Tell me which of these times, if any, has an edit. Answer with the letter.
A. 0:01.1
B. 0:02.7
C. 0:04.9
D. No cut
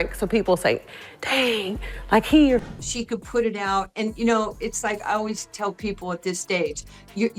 B